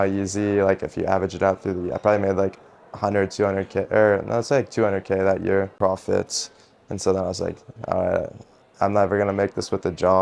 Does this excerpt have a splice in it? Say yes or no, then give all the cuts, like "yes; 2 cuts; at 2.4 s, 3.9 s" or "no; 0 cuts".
yes; 1 cut; at 5.7 s